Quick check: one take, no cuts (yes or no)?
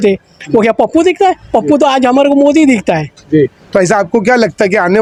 yes